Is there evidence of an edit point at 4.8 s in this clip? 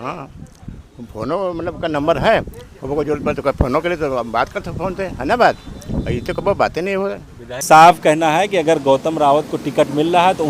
no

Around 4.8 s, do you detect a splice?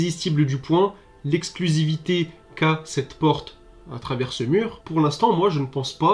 yes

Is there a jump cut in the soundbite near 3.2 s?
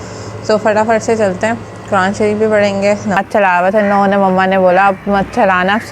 yes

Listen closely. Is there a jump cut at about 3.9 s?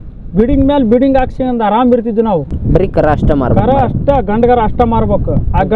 no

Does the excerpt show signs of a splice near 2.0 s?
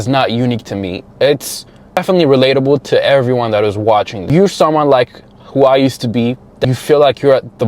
yes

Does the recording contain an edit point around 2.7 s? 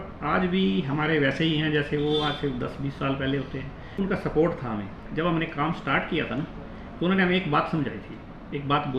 no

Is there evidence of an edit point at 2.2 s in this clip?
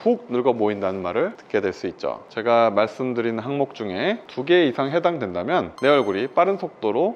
yes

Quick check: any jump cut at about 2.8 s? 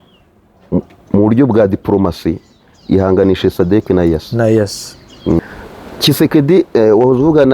no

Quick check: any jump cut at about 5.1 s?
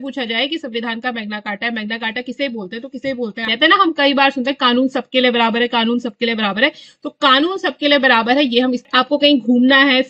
no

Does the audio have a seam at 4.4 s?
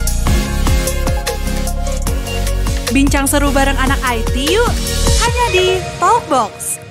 no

